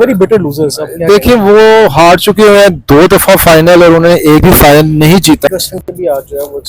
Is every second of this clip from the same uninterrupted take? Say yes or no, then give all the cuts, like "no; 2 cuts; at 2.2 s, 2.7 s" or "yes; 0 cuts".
no; 1 cut; at 5.5 s